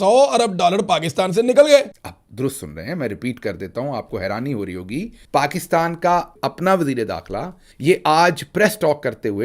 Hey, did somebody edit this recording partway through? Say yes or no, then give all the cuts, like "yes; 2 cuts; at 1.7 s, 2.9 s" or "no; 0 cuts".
yes; 1 cut; at 2.0 s